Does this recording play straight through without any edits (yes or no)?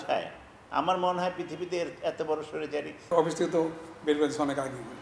no